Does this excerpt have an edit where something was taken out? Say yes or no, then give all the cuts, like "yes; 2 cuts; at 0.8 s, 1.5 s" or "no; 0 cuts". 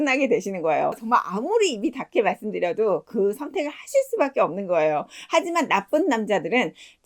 yes; 1 cut; at 1.0 s